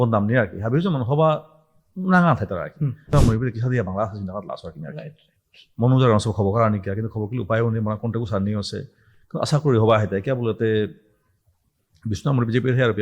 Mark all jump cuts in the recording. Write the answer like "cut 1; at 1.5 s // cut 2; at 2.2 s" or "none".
cut 1; at 3.1 s